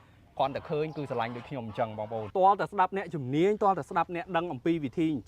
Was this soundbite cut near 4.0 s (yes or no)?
no